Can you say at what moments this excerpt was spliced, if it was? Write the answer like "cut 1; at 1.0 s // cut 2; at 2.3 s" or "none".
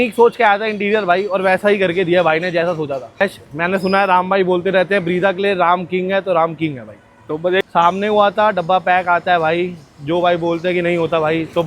cut 1; at 3.2 s // cut 2; at 7.6 s